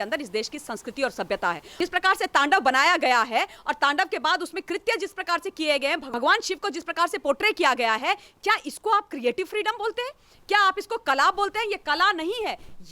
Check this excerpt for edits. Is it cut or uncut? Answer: cut